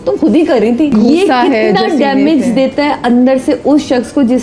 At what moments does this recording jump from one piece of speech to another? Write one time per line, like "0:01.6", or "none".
0:00.9

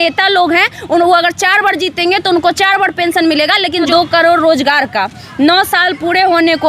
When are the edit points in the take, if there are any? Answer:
0:03.9

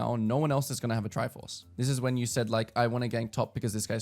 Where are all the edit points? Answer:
0:01.6

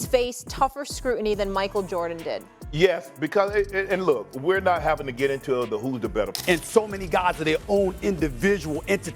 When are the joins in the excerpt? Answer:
0:06.4

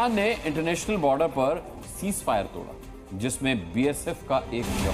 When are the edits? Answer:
none

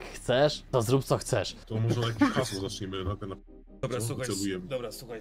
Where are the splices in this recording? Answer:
0:01.5

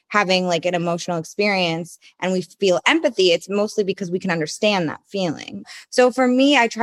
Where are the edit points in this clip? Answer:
0:05.6

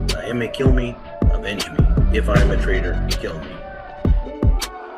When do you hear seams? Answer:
0:03.7

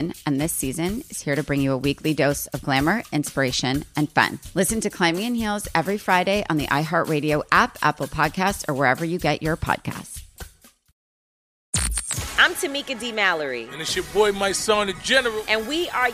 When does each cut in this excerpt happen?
0:11.6

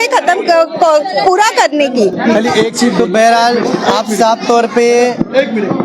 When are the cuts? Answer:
none

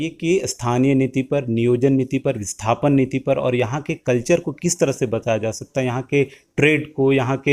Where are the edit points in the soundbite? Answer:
none

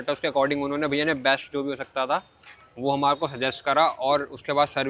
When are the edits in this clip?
none

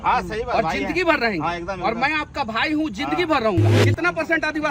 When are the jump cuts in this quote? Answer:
0:03.8

